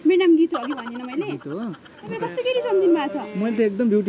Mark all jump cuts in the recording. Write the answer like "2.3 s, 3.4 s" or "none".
2.1 s